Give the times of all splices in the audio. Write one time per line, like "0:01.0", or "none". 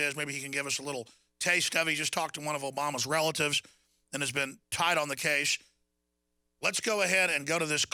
none